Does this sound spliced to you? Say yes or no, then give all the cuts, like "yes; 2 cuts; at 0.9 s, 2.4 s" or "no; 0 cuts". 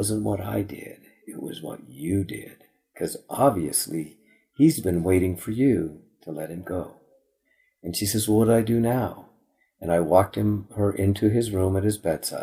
no; 0 cuts